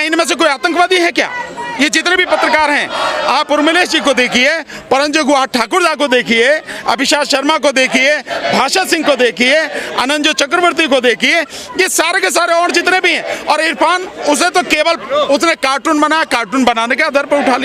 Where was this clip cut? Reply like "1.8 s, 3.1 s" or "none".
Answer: none